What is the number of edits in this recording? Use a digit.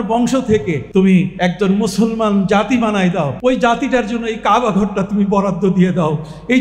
3